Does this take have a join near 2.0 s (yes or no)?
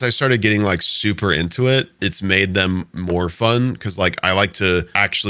no